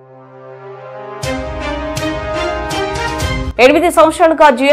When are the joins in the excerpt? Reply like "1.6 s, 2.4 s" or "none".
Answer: 3.4 s